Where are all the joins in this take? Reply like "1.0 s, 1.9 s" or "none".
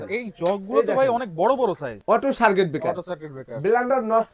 1.9 s